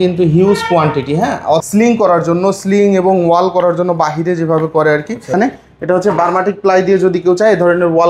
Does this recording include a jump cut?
yes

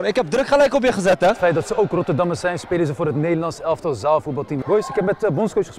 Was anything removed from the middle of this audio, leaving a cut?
yes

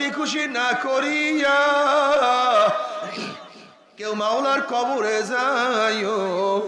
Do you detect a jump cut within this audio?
no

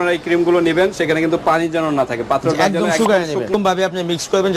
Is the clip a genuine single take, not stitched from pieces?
no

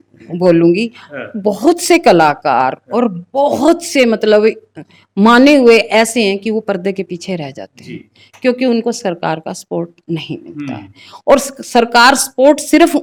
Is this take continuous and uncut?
yes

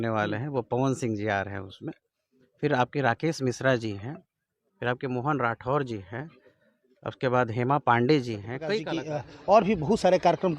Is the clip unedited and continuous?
no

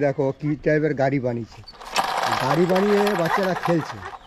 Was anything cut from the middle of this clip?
no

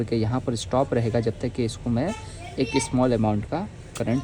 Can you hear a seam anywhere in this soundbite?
no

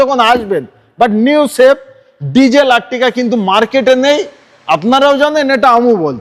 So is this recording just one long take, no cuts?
yes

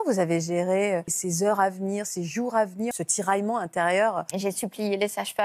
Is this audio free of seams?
no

